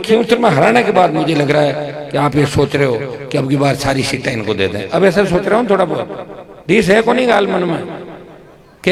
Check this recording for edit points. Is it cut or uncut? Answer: uncut